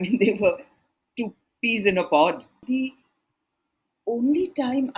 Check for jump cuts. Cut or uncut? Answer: cut